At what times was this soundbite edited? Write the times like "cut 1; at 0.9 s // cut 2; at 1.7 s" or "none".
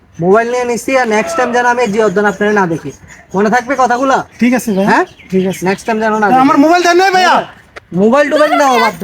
none

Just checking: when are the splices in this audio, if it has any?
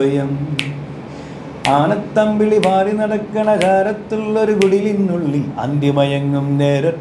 none

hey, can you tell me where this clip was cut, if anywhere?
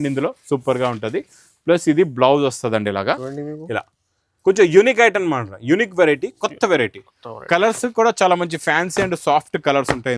cut 1; at 3.3 s

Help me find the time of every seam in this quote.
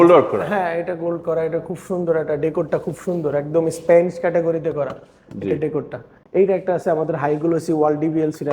cut 1; at 6.1 s

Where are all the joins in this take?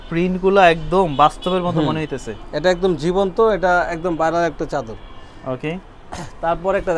none

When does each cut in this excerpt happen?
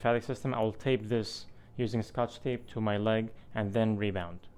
none

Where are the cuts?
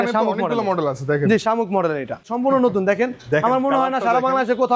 cut 1; at 2.3 s

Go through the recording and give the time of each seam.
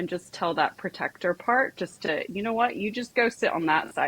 none

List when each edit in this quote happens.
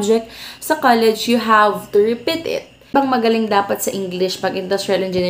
cut 1; at 2.9 s

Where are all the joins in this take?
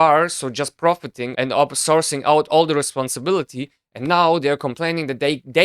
cut 1; at 1.2 s

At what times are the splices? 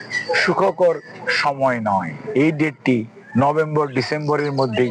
cut 1; at 2.2 s

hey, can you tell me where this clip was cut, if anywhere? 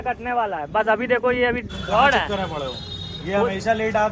cut 1; at 1.7 s

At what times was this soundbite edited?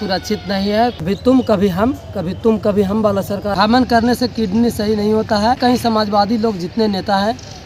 cut 1; at 1.0 s // cut 2; at 3.5 s // cut 3; at 5.6 s

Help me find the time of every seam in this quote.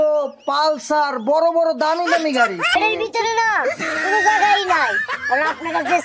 cut 1; at 2.7 s

